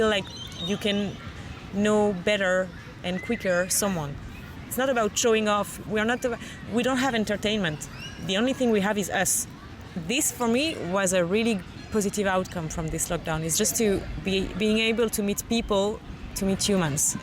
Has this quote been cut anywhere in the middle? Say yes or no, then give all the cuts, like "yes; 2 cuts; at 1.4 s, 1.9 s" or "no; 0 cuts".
yes; 3 cuts; at 4.7 s, 9.7 s, 16.1 s